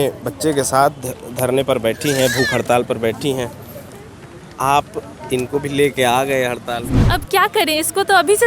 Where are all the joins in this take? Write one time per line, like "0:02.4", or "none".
0:06.9